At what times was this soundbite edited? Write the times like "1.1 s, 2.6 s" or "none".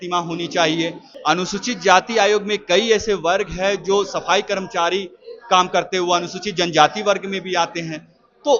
1.1 s